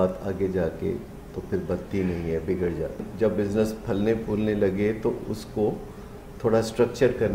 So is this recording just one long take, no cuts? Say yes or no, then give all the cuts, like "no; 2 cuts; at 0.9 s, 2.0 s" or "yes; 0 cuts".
no; 1 cut; at 3.1 s